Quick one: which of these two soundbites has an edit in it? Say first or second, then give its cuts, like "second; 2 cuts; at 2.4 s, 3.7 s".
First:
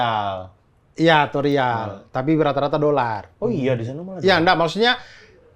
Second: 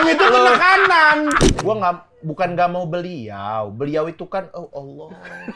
second; 1 cut; at 1.5 s